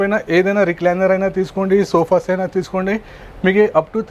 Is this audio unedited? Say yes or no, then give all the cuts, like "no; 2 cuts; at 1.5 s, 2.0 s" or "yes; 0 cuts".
yes; 0 cuts